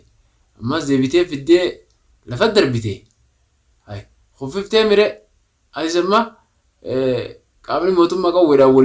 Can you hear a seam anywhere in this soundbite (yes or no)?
no